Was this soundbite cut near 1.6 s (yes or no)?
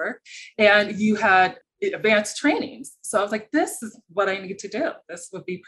no